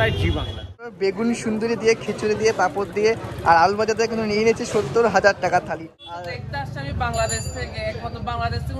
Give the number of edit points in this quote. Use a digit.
2